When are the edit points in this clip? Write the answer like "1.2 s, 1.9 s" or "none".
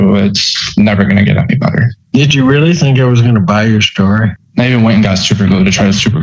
2.0 s, 4.4 s